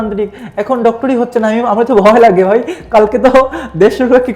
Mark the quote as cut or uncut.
uncut